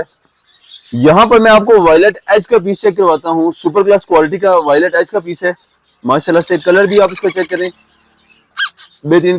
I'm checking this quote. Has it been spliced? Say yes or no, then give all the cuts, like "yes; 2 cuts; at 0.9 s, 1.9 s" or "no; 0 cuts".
no; 0 cuts